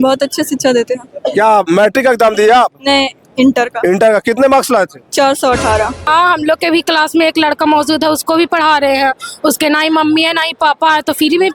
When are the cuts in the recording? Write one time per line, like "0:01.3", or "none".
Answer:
0:06.1